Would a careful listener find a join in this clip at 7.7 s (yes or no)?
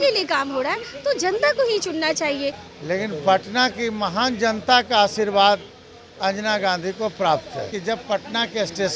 yes